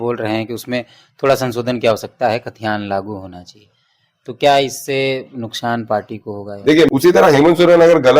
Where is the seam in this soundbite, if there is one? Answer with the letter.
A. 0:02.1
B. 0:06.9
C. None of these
B